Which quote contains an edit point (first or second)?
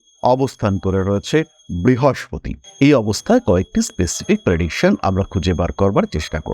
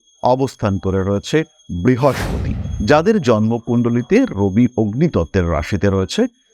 second